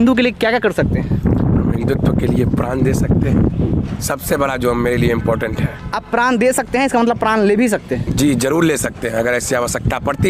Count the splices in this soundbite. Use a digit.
0